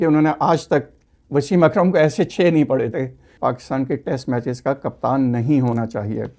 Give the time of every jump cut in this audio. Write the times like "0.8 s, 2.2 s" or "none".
3.3 s